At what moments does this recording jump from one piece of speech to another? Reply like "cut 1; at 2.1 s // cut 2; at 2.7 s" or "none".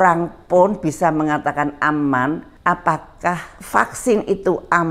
cut 1; at 2.5 s // cut 2; at 3.5 s